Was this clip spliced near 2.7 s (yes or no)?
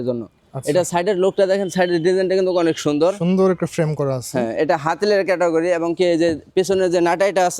no